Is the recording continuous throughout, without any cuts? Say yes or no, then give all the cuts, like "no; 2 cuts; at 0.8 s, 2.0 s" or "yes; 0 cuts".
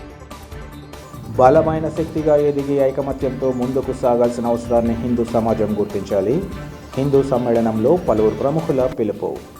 no; 1 cut; at 1.0 s